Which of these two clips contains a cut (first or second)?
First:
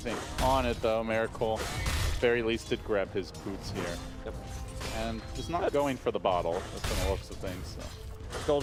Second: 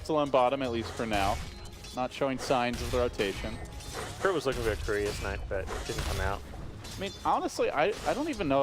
second